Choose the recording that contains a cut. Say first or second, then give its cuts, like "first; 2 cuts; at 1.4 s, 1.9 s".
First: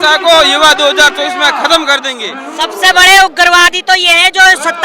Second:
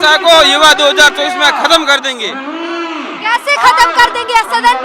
first; 1 cut; at 2.4 s